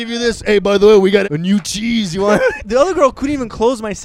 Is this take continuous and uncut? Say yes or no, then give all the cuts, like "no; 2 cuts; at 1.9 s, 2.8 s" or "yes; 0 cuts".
no; 2 cuts; at 1.2 s, 2.6 s